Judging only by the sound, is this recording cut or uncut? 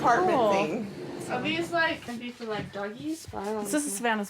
cut